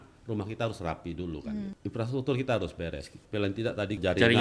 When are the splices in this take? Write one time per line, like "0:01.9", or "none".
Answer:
none